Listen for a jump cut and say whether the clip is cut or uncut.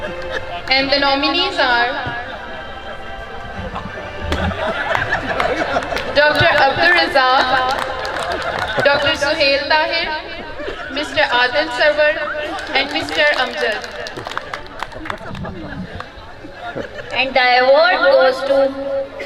uncut